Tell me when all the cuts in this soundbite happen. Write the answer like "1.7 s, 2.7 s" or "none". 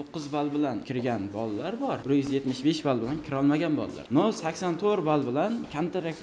0.9 s, 2.0 s, 4.0 s

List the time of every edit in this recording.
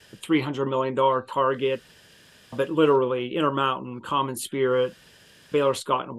none

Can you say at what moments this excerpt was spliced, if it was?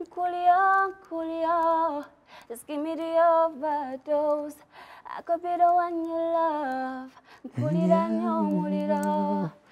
none

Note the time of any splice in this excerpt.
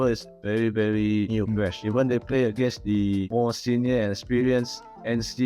1.6 s, 3.3 s

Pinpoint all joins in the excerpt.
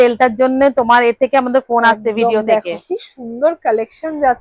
none

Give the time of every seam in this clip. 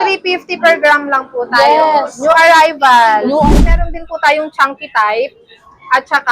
3.5 s

